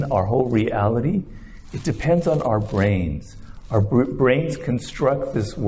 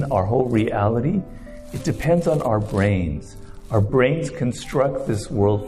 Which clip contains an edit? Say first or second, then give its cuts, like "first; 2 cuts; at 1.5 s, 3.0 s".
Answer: second; 1 cut; at 3.9 s